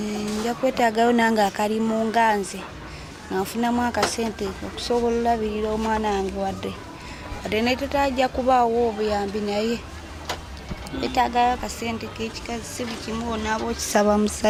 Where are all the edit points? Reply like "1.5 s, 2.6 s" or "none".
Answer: none